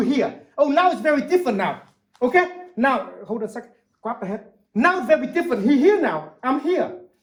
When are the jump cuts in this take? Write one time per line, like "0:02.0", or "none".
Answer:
none